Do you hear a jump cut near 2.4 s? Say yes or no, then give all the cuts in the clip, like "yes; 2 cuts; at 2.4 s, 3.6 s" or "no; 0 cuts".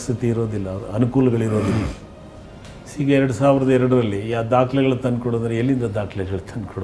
no; 0 cuts